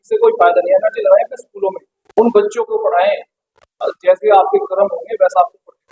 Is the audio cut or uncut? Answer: uncut